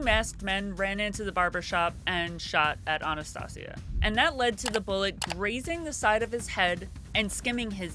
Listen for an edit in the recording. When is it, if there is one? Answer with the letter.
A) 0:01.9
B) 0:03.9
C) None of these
B